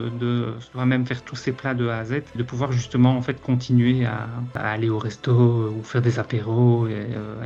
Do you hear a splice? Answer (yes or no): no